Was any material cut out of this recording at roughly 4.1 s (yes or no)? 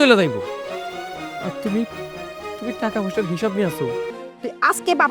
yes